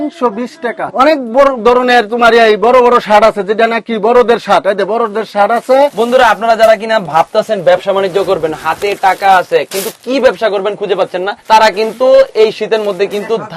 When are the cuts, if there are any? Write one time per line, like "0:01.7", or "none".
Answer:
0:00.9
0:05.9
0:11.3